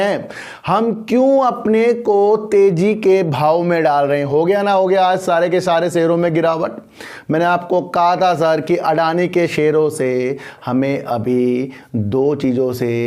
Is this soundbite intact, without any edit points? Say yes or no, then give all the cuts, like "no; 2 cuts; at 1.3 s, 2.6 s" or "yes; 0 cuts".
yes; 0 cuts